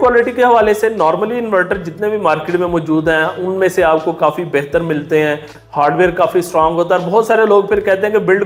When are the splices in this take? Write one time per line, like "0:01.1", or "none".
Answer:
none